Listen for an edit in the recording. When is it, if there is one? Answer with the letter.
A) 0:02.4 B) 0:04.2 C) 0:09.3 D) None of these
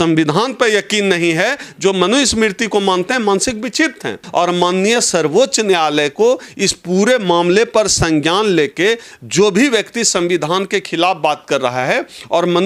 B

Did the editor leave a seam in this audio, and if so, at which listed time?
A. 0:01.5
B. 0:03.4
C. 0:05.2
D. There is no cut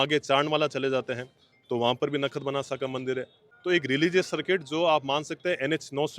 B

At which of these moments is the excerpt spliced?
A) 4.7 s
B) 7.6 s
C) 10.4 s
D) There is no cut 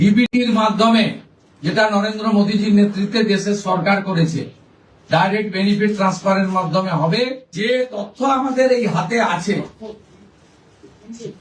B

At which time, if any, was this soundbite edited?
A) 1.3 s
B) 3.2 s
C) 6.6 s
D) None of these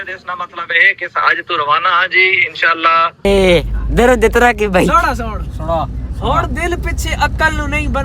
B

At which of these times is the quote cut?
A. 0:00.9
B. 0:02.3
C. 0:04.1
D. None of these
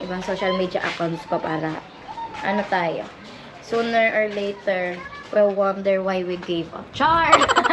D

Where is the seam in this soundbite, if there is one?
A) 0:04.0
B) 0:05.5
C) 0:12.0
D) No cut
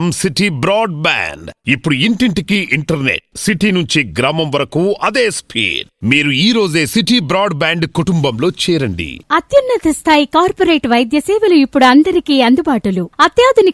D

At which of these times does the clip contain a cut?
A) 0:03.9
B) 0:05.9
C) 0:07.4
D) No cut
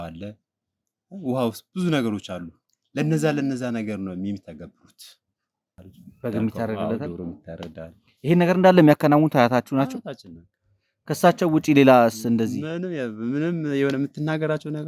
B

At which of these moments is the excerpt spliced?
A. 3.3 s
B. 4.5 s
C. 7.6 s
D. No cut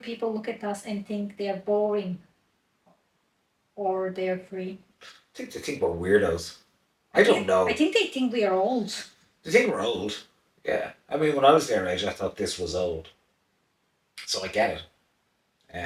D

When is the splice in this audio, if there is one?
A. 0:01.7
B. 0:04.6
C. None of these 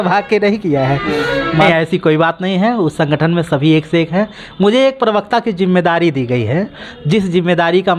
A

